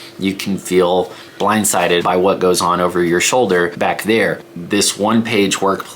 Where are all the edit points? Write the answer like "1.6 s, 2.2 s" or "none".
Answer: 2.0 s, 3.7 s, 4.7 s